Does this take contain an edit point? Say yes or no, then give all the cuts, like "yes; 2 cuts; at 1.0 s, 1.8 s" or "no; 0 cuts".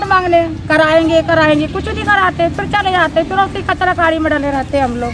no; 0 cuts